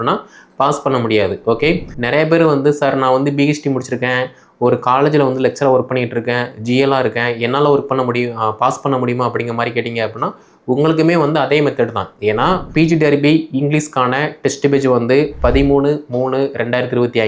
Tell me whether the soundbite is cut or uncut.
cut